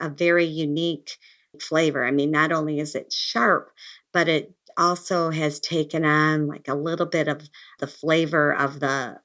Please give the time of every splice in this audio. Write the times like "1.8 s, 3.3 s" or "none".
none